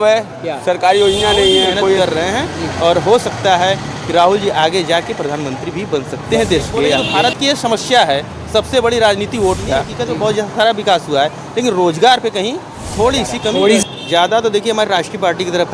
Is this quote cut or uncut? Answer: cut